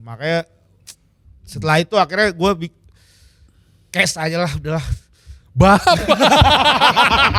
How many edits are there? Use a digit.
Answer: 0